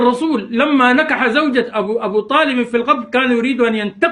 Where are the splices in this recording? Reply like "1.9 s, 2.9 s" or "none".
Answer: none